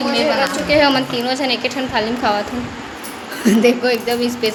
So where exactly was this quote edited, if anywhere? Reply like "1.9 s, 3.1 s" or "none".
none